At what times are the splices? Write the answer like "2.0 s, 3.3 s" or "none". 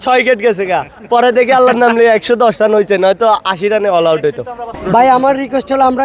4.7 s